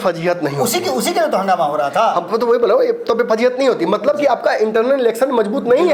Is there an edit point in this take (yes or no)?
no